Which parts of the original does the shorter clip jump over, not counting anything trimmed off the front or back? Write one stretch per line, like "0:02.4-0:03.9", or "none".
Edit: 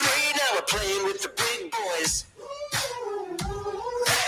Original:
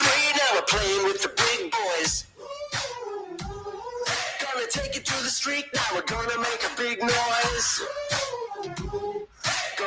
none